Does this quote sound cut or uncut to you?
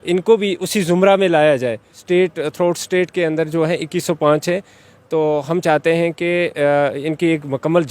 cut